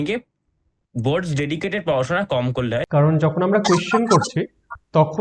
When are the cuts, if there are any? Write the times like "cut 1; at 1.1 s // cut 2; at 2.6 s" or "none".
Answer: cut 1; at 2.9 s